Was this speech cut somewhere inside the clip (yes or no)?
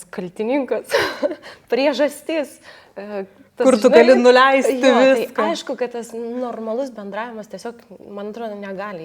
no